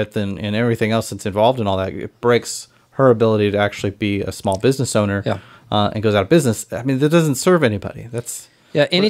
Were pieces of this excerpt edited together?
no; 0 cuts

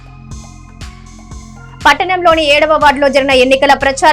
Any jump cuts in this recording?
yes; 1 cut; at 0.9 s

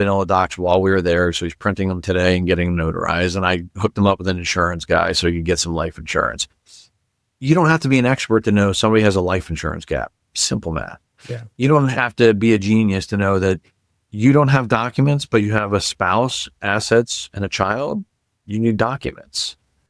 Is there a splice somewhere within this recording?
no; 0 cuts

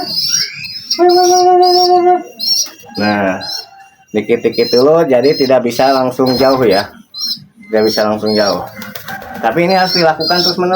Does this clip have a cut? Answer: no; 0 cuts

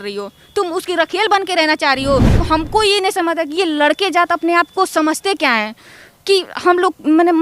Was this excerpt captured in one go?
no; 1 cut; at 2.4 s

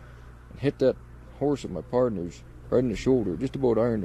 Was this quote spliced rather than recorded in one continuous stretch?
no; 0 cuts

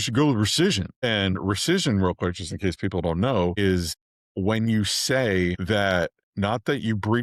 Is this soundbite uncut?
yes; 0 cuts

